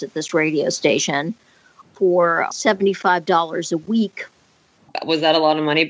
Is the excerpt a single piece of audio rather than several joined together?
no; 1 cut; at 2.5 s

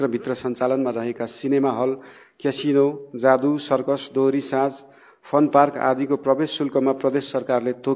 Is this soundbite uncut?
yes; 0 cuts

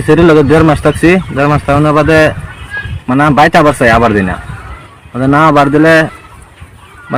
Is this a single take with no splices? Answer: yes; 0 cuts

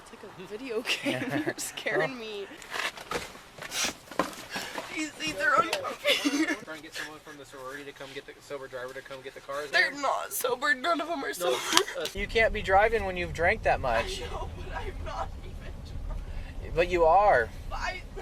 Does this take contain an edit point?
yes; 4 cuts; at 2.5 s, 6.6 s, 9.7 s, 12.1 s

